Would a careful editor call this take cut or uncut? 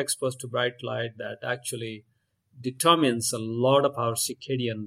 uncut